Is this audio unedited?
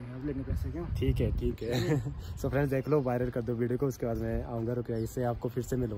yes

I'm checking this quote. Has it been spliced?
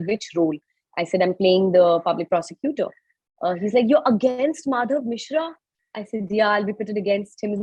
no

